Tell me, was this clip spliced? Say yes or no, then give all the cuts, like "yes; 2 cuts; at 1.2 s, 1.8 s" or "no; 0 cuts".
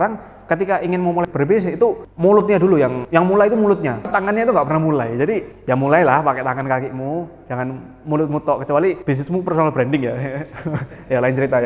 no; 0 cuts